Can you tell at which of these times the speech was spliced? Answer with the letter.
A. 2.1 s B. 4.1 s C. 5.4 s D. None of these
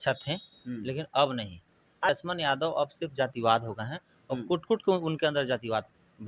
A